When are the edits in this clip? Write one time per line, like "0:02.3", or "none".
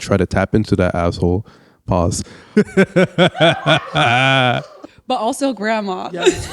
0:02.3
0:04.7